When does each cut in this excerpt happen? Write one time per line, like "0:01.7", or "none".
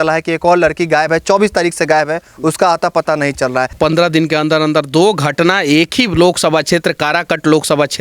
0:03.7